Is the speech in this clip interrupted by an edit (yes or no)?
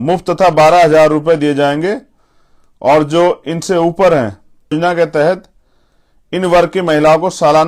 yes